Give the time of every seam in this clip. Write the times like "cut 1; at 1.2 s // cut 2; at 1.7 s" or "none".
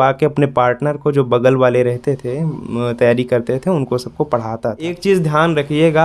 cut 1; at 5.0 s

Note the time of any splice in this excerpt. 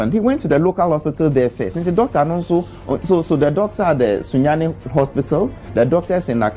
none

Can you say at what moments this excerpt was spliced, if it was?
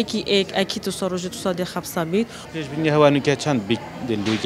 cut 1; at 2.4 s

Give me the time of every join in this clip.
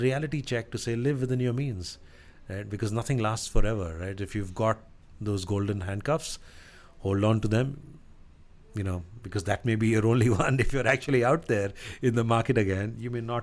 none

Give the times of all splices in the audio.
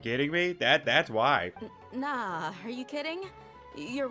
cut 1; at 1.6 s

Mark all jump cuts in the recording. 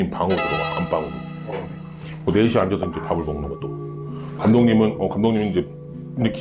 none

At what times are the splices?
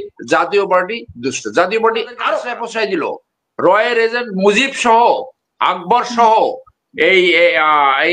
cut 1; at 2.6 s

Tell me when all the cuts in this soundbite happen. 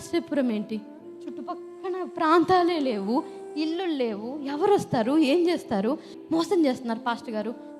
cut 1; at 6.1 s

